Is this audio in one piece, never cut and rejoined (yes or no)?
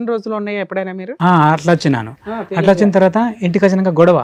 yes